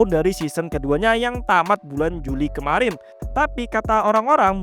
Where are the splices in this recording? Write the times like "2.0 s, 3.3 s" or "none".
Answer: 3.2 s